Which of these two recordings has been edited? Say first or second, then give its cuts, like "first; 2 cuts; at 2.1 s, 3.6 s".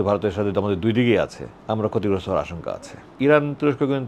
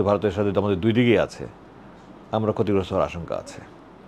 first; 2 cuts; at 1.5 s, 3.2 s